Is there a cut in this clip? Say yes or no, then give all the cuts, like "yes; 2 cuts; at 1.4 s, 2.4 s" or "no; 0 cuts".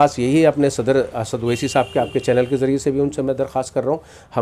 no; 0 cuts